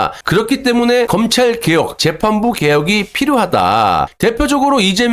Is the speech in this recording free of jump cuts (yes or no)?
no